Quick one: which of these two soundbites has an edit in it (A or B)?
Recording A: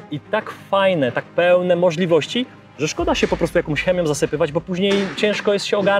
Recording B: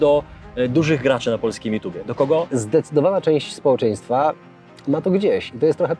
B